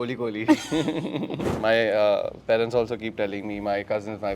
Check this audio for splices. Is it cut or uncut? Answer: cut